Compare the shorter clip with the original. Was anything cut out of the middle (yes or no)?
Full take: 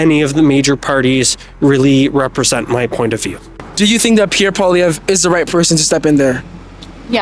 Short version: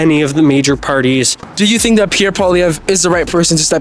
yes